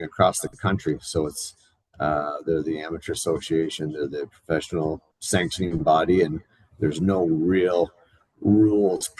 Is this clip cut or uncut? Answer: cut